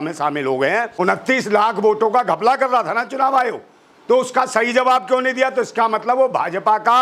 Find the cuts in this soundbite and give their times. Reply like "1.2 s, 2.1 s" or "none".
0.9 s